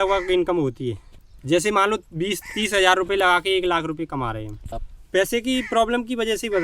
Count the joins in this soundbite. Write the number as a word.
two